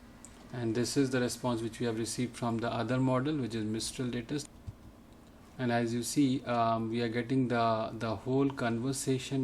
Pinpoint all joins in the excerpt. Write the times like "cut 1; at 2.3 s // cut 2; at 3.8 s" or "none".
cut 1; at 4.5 s